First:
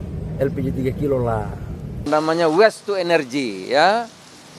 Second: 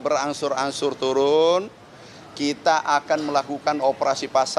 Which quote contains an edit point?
first; 1 cut; at 2.1 s

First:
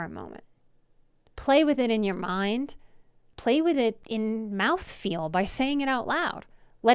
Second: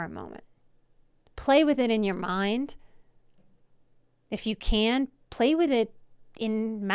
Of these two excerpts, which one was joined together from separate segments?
first; 2 cuts; at 3.3 s, 4.0 s

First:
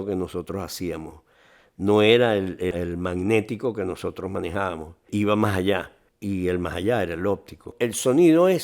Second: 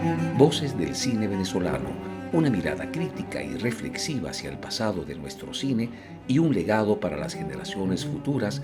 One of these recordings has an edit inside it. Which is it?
first; 1 cut; at 7.6 s

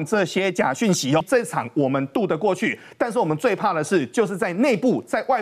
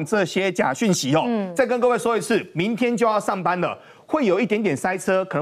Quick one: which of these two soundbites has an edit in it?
first; 1 cut; at 1.2 s

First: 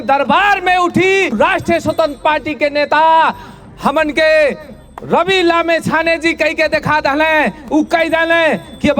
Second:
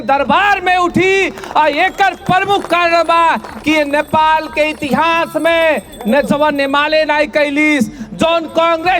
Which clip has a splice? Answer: first; 1 cut; at 1.3 s

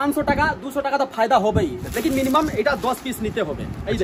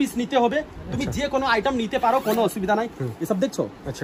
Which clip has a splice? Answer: first; 1 cut; at 1.8 s

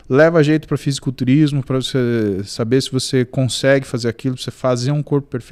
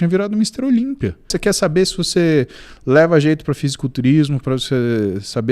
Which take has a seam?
second; 1 cut; at 1.3 s

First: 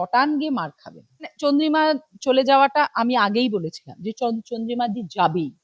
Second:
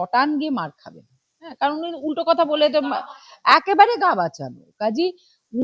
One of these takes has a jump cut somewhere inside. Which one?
first; 1 cut; at 1.3 s

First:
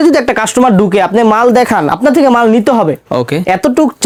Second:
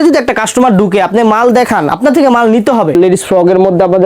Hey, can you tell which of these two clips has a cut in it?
second; 1 cut; at 2.9 s

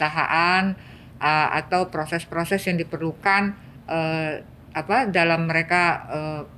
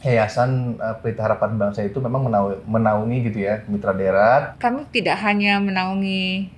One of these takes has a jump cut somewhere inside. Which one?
second; 1 cut; at 4.5 s

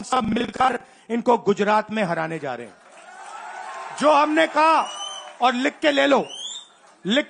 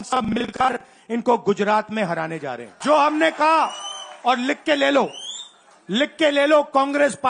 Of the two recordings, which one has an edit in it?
second; 1 cut; at 2.6 s

